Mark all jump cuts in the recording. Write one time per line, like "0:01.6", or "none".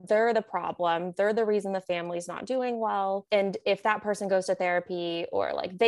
0:03.2